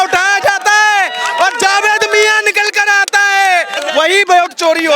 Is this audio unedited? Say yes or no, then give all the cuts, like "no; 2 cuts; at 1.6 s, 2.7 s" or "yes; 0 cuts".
no; 1 cut; at 3.7 s